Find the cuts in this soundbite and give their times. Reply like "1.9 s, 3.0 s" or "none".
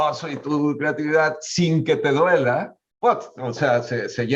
none